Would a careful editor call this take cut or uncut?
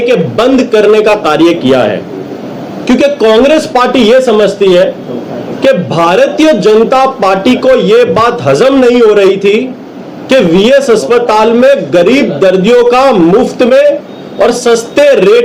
uncut